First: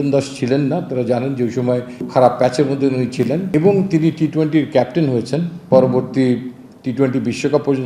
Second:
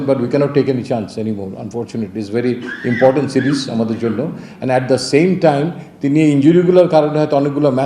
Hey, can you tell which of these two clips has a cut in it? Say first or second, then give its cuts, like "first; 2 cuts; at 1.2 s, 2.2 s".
first; 3 cuts; at 2.0 s, 3.5 s, 5.5 s